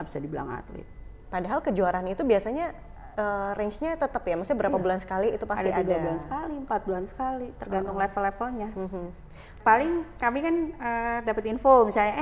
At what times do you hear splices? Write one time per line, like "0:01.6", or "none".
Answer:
none